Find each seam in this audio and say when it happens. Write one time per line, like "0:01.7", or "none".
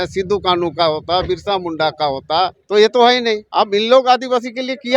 0:02.6
0:03.4